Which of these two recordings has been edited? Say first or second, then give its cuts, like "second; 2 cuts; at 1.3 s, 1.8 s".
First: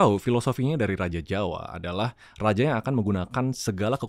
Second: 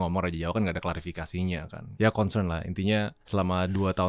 second; 2 cuts; at 1.8 s, 3.2 s